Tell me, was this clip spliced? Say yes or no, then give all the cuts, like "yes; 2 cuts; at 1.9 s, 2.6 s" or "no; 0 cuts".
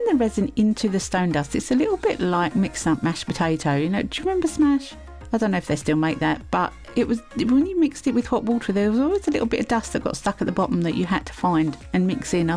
no; 0 cuts